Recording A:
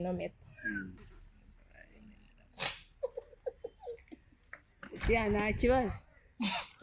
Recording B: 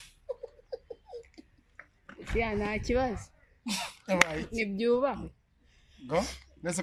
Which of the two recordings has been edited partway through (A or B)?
A